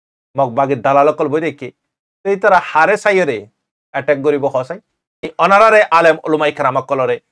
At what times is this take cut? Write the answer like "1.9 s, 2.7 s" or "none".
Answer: 5.3 s